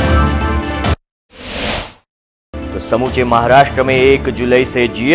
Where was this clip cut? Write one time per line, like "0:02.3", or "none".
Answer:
0:00.9
0:02.7